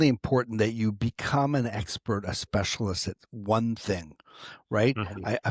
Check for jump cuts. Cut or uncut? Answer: uncut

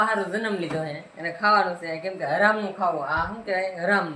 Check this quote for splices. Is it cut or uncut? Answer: uncut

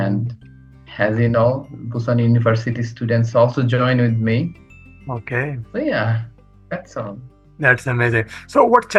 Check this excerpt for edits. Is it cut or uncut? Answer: uncut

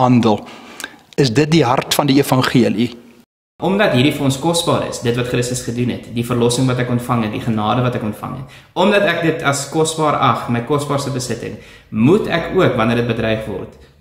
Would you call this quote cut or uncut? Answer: cut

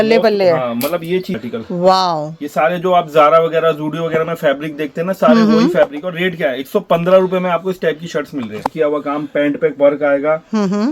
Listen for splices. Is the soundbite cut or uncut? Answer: cut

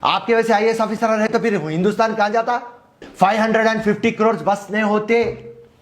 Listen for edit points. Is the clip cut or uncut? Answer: cut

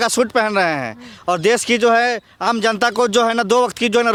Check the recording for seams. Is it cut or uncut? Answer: uncut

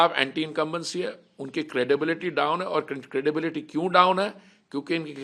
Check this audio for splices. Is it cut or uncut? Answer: uncut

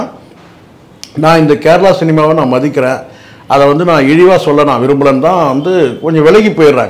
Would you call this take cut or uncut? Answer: uncut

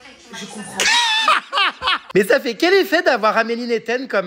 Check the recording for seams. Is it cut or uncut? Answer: cut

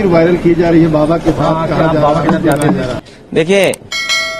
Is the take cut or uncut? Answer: uncut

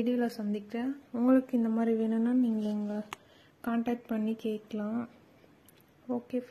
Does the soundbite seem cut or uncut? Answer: uncut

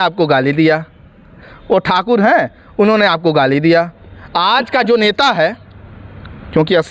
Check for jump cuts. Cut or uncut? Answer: uncut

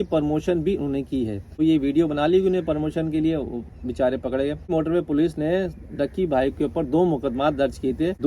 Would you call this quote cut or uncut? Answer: cut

